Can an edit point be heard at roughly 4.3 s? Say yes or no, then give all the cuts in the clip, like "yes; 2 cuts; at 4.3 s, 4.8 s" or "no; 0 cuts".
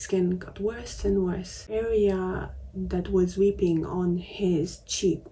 no; 1 cut; at 1.6 s